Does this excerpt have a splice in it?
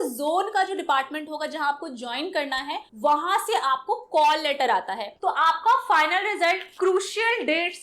yes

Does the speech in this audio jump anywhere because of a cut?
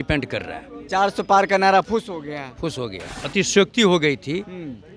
yes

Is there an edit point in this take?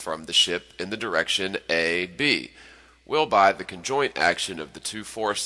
yes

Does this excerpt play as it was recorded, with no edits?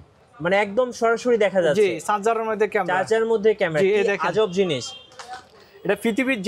yes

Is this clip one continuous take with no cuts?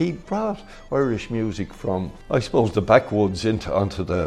no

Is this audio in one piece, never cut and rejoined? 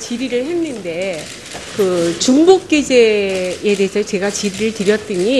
yes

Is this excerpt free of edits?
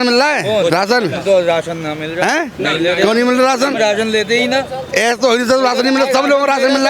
yes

